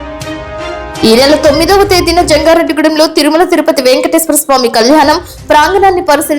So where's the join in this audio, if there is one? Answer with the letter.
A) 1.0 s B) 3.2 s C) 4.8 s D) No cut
A